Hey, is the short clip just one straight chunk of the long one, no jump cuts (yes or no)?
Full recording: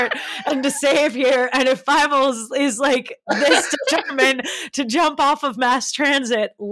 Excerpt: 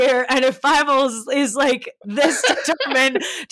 yes